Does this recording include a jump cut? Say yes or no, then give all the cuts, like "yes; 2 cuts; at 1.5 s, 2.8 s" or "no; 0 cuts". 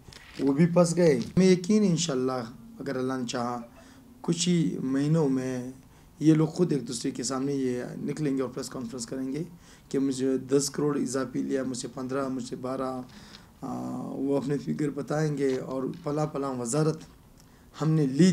yes; 1 cut; at 1.3 s